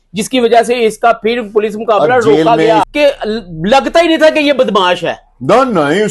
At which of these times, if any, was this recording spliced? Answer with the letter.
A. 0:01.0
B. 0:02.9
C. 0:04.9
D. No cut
B